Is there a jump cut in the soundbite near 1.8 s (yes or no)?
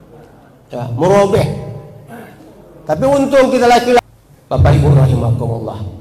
no